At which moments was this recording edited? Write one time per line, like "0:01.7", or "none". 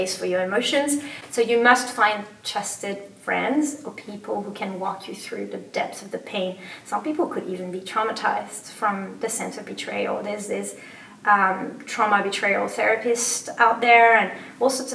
none